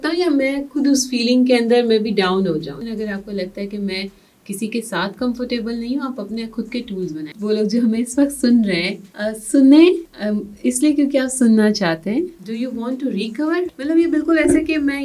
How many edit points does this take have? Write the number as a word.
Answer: four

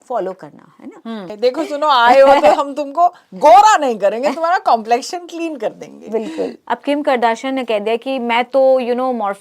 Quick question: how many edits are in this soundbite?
two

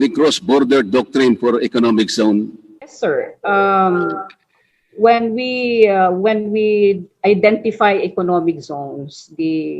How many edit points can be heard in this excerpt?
one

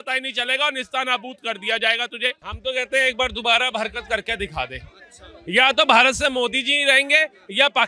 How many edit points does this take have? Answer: one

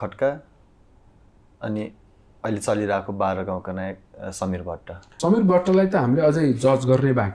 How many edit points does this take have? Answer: one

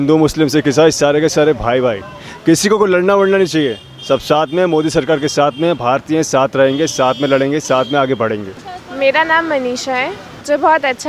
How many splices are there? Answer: one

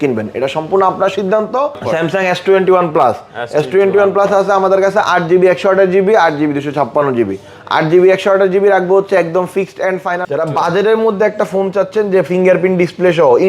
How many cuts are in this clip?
two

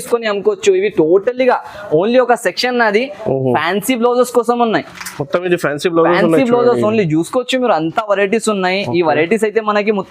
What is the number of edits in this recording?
zero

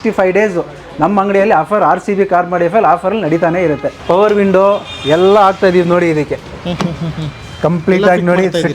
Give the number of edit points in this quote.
one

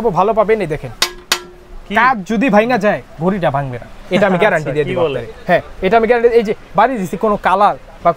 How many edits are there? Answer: zero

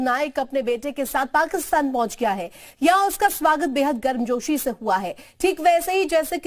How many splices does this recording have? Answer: zero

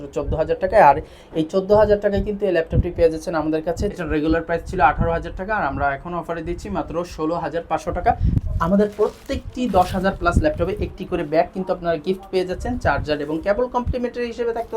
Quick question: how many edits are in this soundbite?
two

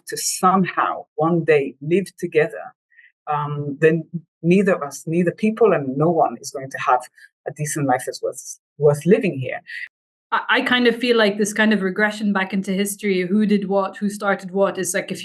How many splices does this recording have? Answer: one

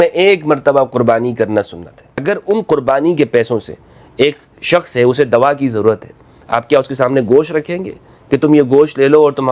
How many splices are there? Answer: one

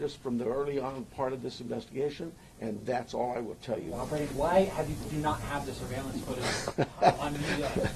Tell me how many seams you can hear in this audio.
one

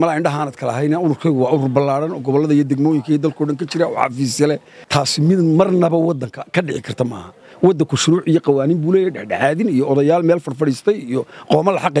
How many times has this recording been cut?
one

